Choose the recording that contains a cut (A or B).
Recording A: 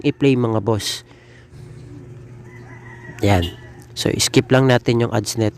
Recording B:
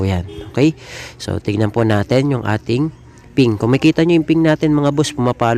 A